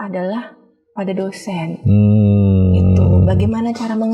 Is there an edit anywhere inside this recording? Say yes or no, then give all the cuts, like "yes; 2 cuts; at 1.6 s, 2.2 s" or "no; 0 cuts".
no; 0 cuts